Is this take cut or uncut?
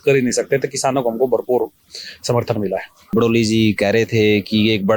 cut